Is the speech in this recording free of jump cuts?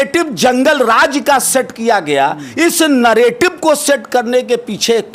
yes; 0 cuts

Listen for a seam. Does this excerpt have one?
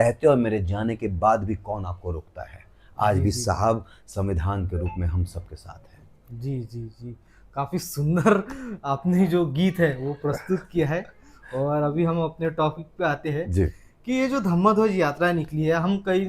no; 0 cuts

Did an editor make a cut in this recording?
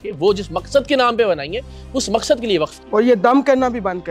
no; 0 cuts

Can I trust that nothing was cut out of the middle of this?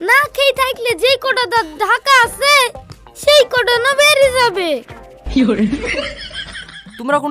yes; 0 cuts

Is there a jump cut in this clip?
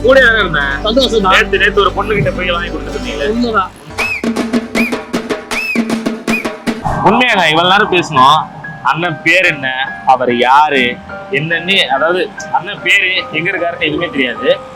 yes; 1 cut; at 6.8 s

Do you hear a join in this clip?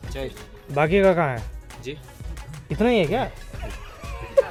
no; 0 cuts

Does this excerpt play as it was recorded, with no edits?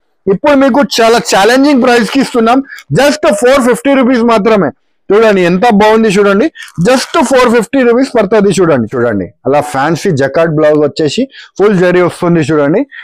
no; 1 cut; at 8.9 s

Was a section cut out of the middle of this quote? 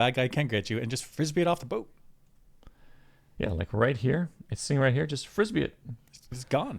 no; 0 cuts

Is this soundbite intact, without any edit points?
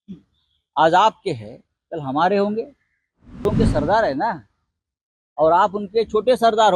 no; 1 cut; at 3.5 s

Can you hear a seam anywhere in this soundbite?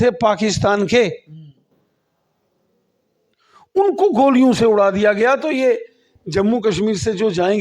no; 0 cuts

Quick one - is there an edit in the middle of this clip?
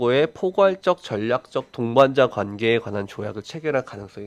no; 0 cuts

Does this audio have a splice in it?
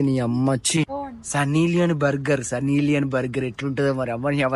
yes; 1 cut; at 0.9 s

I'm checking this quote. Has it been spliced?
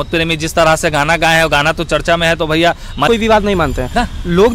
yes; 1 cut; at 3.1 s

